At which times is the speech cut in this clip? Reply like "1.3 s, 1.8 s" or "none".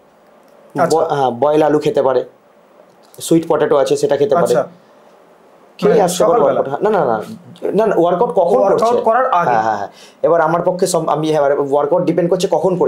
none